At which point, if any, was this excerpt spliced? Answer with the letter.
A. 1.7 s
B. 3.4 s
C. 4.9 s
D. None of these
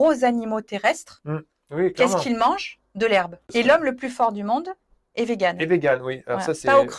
B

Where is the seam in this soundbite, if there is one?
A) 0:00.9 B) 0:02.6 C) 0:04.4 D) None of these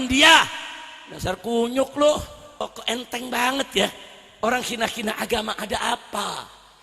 B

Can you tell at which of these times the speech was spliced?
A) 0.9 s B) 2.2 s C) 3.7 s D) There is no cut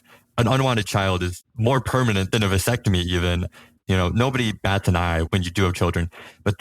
C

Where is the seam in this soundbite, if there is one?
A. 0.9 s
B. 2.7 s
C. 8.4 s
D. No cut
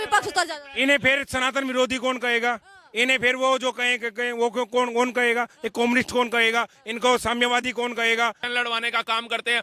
C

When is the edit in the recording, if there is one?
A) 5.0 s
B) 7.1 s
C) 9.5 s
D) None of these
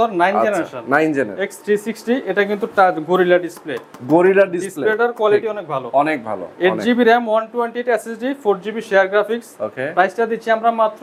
D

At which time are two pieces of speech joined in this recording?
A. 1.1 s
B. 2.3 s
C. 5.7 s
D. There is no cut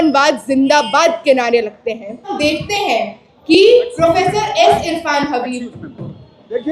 B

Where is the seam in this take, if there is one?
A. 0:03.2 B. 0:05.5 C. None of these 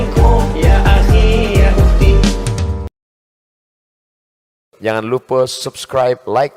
C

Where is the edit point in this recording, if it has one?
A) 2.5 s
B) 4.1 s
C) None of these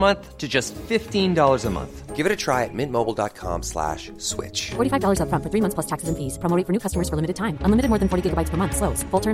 C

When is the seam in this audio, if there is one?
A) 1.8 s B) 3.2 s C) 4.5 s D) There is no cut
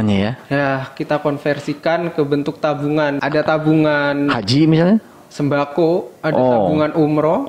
B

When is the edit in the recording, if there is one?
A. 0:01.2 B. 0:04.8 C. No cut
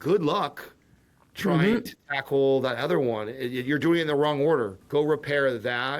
B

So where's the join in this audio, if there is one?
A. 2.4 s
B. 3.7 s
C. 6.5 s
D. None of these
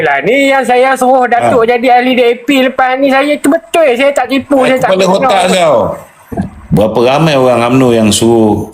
C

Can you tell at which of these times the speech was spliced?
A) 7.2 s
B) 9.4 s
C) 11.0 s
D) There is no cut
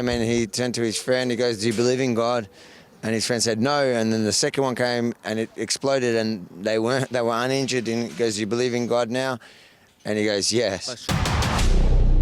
C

